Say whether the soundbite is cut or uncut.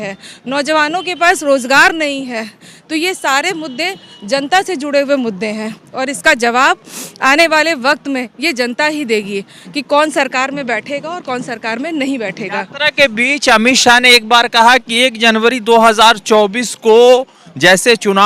uncut